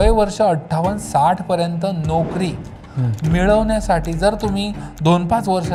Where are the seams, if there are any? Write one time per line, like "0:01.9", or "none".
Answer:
none